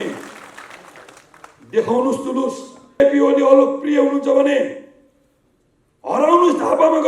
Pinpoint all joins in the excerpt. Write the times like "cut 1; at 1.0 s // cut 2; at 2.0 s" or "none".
cut 1; at 3.0 s